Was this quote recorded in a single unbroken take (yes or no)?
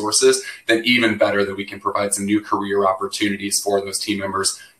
yes